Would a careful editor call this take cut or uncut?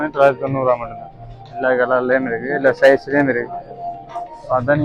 uncut